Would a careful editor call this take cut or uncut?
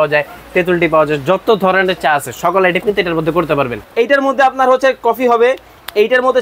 cut